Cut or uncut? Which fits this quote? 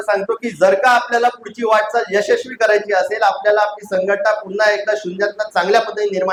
uncut